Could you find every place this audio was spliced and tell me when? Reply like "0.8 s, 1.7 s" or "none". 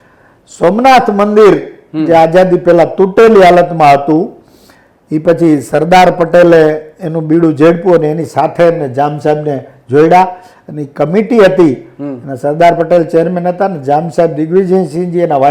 none